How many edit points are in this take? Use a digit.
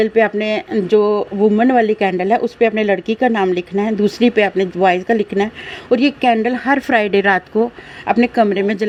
0